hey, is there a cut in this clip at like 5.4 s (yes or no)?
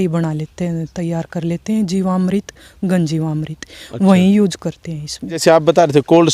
yes